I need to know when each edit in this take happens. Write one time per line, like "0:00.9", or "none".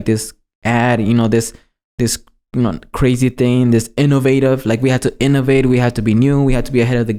none